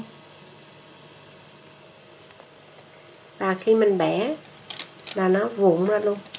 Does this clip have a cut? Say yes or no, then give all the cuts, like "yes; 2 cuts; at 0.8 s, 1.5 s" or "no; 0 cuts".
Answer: no; 0 cuts